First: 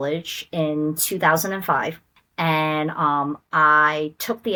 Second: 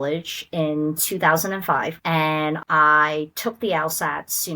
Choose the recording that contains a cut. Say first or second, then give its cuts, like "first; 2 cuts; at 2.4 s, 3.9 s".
second; 1 cut; at 2.4 s